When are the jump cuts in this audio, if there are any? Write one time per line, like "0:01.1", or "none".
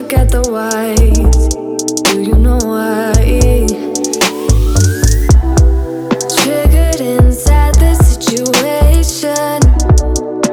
none